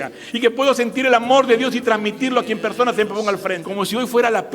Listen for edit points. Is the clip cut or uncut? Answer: cut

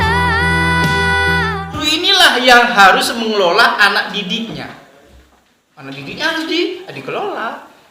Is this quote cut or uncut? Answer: cut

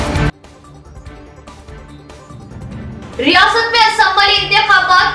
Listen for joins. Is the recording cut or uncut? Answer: cut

